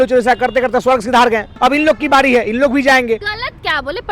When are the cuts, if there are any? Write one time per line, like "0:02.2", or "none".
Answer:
0:01.5
0:03.3